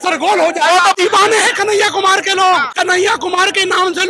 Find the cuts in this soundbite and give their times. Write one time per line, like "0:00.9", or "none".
0:00.9
0:02.7